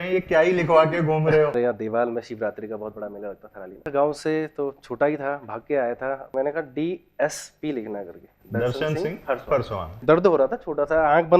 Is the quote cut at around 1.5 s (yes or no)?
yes